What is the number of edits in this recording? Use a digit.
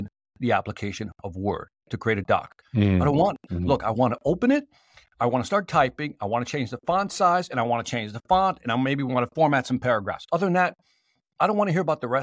1